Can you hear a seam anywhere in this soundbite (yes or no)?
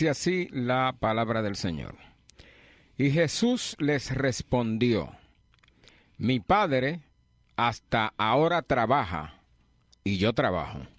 yes